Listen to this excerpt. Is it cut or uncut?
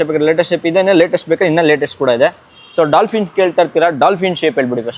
uncut